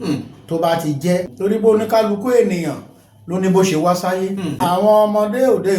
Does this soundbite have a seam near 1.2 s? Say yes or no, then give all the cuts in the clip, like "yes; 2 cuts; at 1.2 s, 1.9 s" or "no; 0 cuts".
yes; 2 cuts; at 1.2 s, 4.5 s